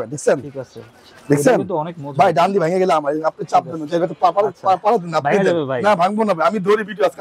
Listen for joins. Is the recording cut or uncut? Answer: uncut